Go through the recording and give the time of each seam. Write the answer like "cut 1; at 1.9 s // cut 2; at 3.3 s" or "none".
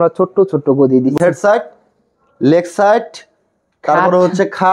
cut 1; at 1.2 s